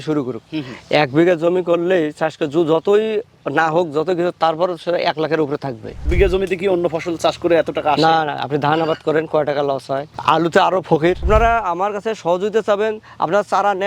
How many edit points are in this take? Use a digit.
3